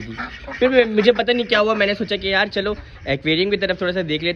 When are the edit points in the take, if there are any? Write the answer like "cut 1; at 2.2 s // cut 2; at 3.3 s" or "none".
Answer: none